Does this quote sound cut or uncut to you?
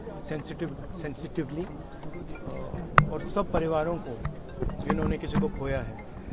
uncut